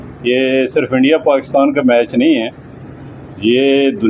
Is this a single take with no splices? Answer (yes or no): yes